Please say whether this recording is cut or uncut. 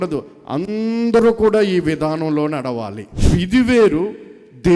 cut